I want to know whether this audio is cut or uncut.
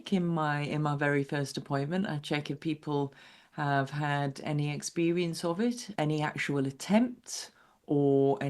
cut